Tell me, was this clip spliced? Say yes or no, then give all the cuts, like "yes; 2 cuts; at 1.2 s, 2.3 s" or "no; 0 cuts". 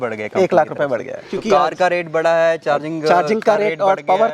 yes; 1 cut; at 1.2 s